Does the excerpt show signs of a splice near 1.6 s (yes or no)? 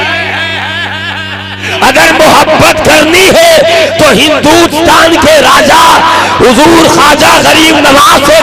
yes